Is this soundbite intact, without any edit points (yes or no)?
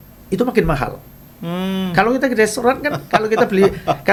yes